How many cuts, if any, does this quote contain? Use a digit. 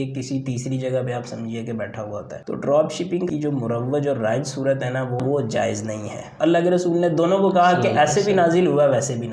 4